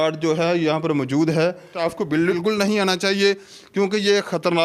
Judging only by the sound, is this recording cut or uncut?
cut